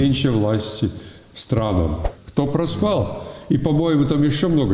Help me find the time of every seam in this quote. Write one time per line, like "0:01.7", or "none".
0:02.0